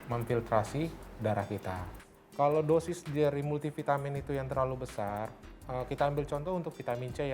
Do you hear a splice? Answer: yes; 1 cut; at 2.0 s

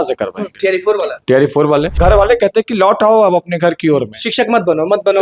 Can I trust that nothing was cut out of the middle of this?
no; 1 cut; at 2.0 s

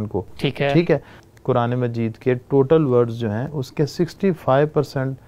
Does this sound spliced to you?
yes; 1 cut; at 1.2 s

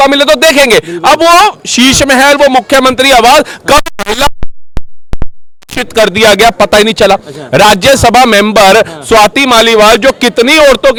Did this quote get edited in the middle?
no; 0 cuts

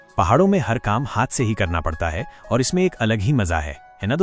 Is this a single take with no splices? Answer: yes; 0 cuts

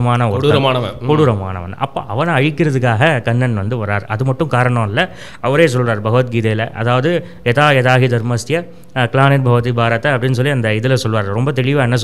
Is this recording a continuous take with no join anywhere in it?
yes; 0 cuts

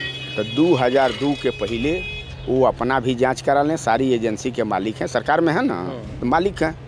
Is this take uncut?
yes; 0 cuts

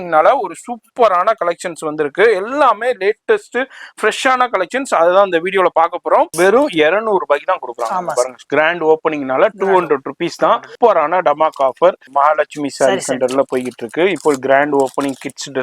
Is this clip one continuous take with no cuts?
no; 3 cuts; at 6.3 s, 10.7 s, 12.0 s

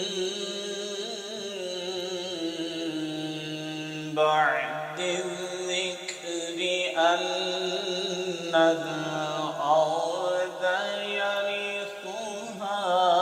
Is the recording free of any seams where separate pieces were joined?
yes; 0 cuts

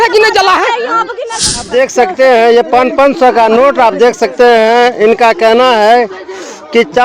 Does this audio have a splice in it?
yes; 1 cut; at 1.6 s

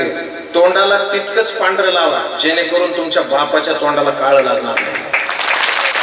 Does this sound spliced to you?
no; 0 cuts

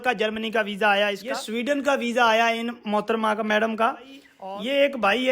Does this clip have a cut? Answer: yes; 2 cuts; at 1.3 s, 4.3 s

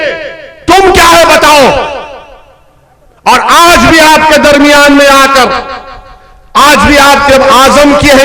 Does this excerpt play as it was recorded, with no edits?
yes; 0 cuts

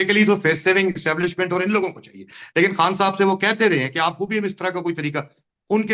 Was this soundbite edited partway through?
no; 0 cuts

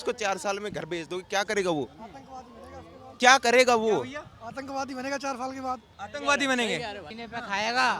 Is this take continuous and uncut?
no; 1 cut; at 7.0 s

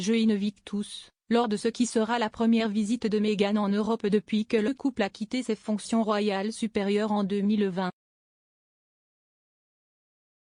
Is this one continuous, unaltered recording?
yes; 0 cuts

